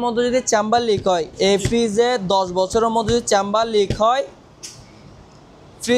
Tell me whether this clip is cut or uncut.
uncut